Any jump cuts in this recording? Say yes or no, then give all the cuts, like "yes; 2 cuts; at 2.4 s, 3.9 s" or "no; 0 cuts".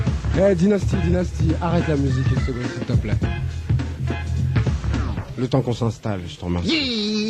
yes; 1 cut; at 5.4 s